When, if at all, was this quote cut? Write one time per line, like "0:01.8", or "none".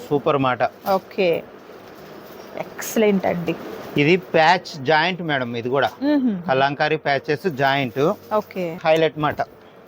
0:08.8